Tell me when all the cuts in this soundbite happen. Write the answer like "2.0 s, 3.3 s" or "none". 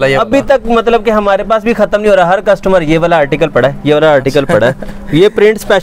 none